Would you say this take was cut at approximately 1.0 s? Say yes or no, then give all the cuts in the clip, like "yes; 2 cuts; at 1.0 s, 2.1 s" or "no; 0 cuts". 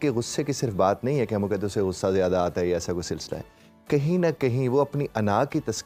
no; 0 cuts